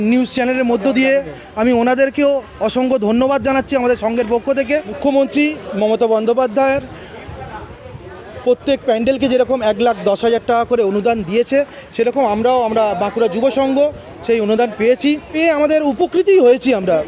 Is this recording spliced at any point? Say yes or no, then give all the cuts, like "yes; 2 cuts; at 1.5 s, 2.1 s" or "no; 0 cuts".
yes; 2 cuts; at 5.0 s, 15.3 s